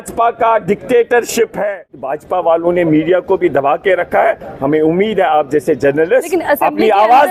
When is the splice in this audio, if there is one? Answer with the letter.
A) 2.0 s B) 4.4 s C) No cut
A